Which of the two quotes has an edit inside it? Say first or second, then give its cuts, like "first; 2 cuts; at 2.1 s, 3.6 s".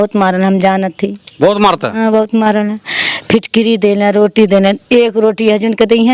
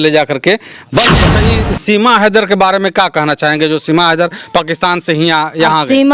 second; 1 cut; at 1.2 s